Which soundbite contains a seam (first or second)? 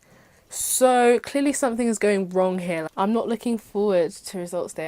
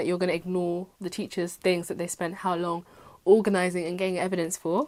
first